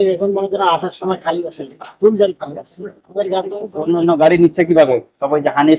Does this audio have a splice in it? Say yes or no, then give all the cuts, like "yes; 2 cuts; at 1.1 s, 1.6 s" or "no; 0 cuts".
no; 0 cuts